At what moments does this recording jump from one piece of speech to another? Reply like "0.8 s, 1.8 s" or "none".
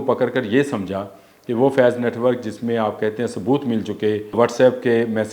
4.4 s